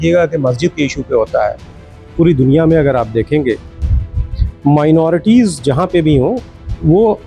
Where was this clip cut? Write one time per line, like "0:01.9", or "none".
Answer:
0:02.1